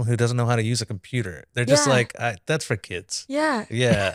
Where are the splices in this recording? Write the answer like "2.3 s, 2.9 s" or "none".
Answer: none